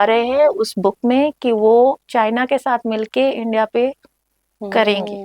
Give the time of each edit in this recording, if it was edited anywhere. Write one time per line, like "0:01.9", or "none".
none